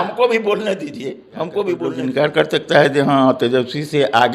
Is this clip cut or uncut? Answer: cut